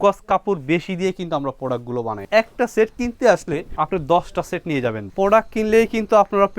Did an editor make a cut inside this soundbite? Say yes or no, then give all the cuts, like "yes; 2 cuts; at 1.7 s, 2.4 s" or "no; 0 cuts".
yes; 3 cuts; at 2.2 s, 3.7 s, 5.0 s